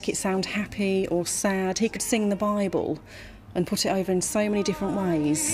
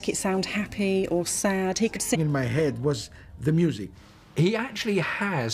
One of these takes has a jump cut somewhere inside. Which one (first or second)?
first